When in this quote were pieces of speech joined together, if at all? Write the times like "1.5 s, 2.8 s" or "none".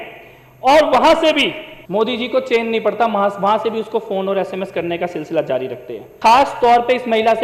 1.7 s, 6.0 s